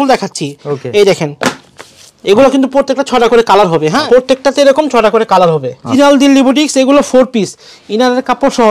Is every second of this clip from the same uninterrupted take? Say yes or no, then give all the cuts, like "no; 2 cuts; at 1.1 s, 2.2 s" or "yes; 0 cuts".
no; 2 cuts; at 4.0 s, 5.9 s